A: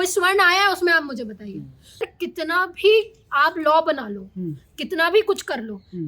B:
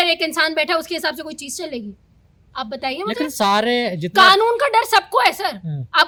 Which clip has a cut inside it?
A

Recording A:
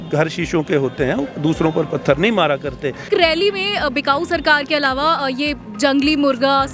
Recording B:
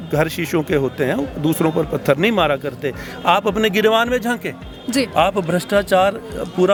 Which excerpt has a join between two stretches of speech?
A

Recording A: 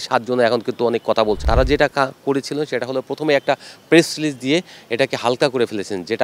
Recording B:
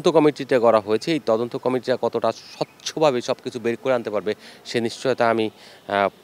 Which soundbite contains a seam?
A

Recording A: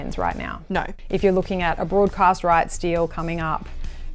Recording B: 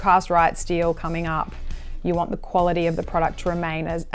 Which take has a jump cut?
A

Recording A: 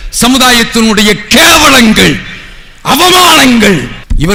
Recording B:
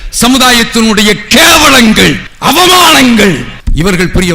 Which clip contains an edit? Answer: B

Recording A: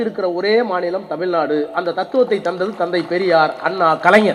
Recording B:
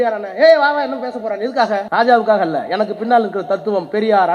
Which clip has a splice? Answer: B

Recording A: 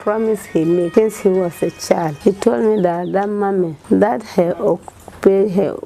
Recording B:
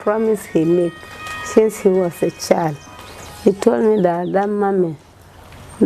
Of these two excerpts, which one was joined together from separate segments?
A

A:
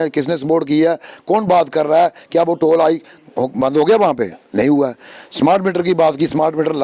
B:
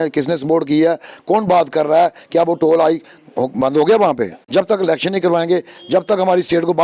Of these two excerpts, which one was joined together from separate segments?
B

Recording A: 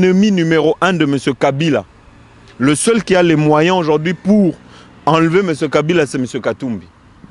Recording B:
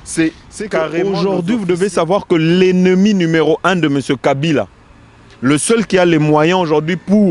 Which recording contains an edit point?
B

